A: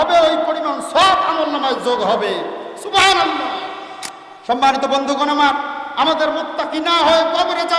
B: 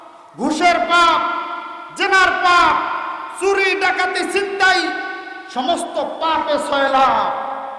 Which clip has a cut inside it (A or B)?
A